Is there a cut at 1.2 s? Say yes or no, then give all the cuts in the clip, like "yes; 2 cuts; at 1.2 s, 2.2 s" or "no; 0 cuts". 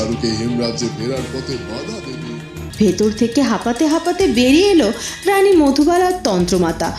no; 1 cut; at 2.6 s